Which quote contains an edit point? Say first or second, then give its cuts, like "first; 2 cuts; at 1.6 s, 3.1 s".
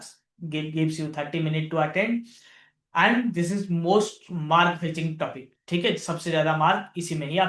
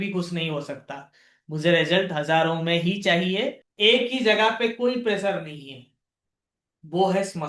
second; 1 cut; at 3.7 s